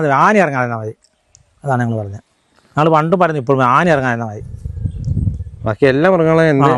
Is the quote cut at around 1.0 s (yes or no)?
no